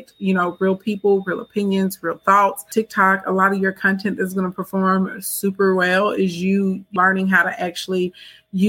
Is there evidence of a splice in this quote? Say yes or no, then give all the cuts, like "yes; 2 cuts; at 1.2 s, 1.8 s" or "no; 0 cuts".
yes; 2 cuts; at 2.7 s, 6.9 s